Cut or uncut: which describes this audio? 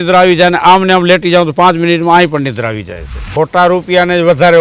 cut